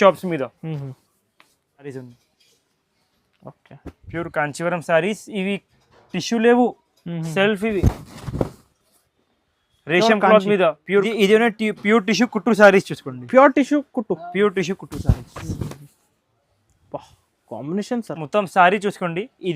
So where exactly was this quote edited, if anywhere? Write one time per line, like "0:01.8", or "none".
0:01.8
0:11.1